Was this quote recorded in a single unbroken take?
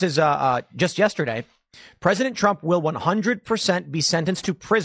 yes; 0 cuts

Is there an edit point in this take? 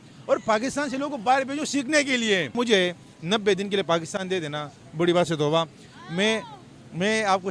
yes; 1 cut; at 2.5 s

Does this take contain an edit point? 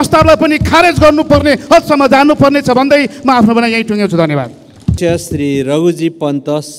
no; 0 cuts

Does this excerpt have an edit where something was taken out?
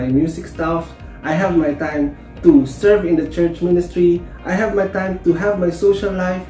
no; 0 cuts

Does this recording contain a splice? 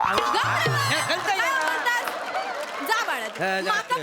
no; 0 cuts

